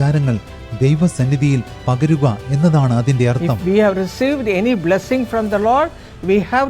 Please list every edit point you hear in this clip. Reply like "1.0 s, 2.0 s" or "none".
3.5 s

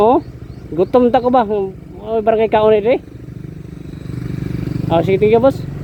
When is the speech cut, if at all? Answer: none

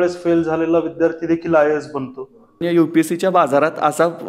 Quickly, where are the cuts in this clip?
2.6 s

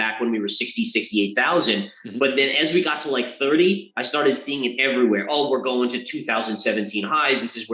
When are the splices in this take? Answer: none

